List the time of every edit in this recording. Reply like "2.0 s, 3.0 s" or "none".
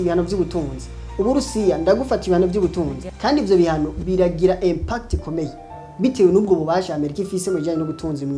3.1 s

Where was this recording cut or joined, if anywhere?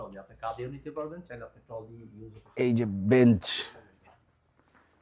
2.5 s

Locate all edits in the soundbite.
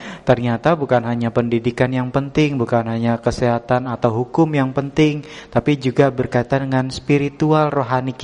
none

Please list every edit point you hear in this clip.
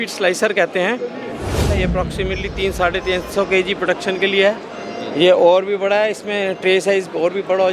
1.7 s

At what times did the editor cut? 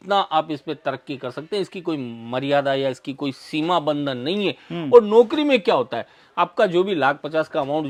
none

